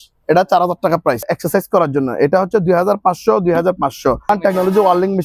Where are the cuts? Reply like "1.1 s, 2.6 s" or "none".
1.3 s, 4.2 s